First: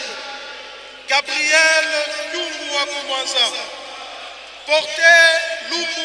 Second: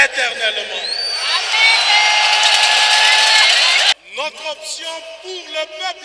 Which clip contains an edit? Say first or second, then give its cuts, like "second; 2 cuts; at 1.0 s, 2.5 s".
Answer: second; 1 cut; at 3.9 s